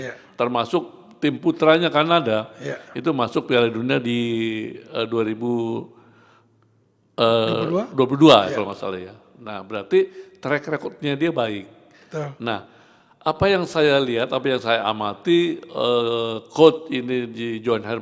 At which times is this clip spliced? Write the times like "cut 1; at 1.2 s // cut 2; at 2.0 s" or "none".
none